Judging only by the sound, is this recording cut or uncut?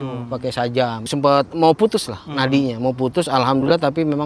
cut